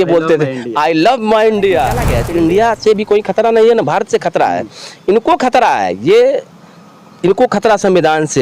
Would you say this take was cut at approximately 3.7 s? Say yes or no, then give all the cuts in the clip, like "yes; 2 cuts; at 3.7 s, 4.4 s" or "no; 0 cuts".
no; 1 cut; at 2.1 s